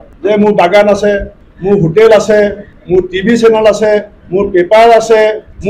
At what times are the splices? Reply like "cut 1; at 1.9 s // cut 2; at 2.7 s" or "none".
cut 1; at 2.7 s // cut 2; at 4.2 s